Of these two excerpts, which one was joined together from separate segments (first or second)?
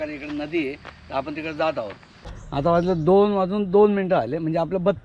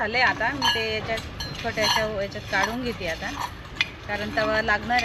first